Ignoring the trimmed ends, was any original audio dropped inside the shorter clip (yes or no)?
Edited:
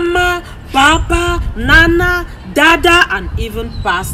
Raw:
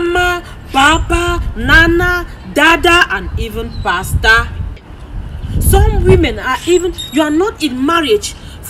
no